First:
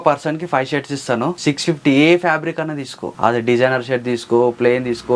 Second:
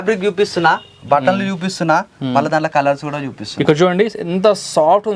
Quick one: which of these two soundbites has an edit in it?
first; 2 cuts; at 1.4 s, 3.0 s

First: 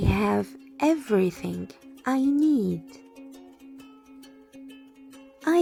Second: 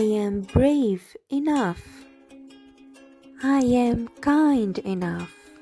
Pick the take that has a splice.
second; 2 cuts; at 1.9 s, 3.4 s

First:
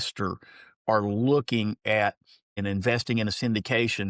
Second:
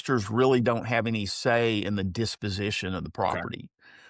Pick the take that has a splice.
first; 1 cut; at 2.5 s

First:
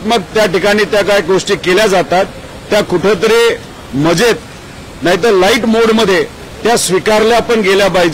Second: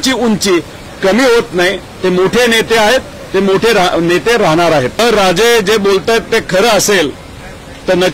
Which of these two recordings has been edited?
second; 1 cut; at 5.0 s

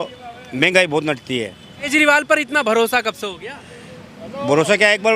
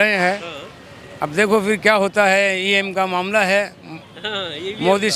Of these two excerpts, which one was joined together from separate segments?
first; 1 cut; at 1.9 s

